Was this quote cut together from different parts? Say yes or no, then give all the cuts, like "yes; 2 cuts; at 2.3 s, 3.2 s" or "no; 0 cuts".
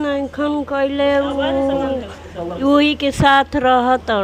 no; 0 cuts